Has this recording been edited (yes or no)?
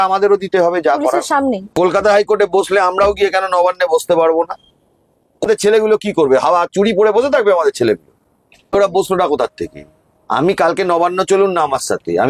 yes